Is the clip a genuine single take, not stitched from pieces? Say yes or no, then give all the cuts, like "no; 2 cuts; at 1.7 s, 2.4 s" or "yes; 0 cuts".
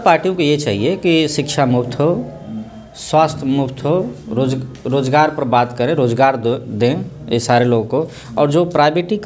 yes; 0 cuts